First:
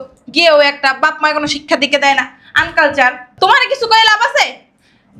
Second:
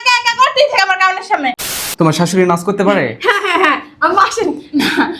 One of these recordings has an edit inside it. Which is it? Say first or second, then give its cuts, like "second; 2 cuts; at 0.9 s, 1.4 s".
second; 1 cut; at 1.6 s